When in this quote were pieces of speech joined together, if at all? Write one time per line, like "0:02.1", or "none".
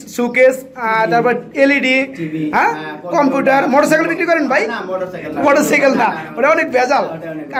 none